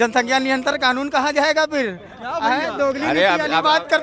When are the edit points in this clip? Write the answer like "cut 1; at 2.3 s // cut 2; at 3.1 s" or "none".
none

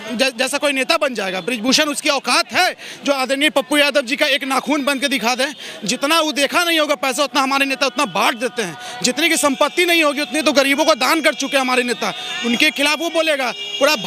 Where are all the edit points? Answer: none

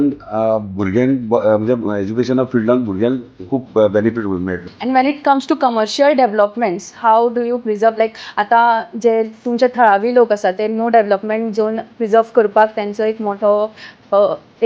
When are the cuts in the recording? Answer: cut 1; at 4.6 s

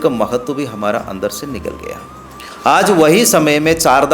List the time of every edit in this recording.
none

